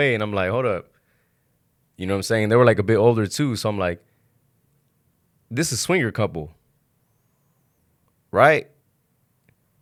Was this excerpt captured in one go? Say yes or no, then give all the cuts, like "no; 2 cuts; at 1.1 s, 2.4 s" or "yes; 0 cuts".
yes; 0 cuts